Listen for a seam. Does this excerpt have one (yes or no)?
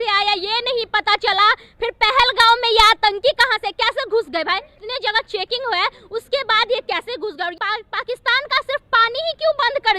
yes